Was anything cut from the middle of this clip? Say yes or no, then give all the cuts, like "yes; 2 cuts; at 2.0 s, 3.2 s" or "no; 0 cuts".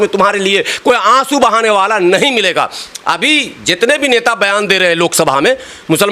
no; 0 cuts